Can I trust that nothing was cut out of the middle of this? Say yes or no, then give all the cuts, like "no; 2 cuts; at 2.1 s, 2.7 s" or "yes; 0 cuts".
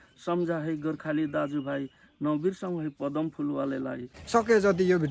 no; 1 cut; at 4.1 s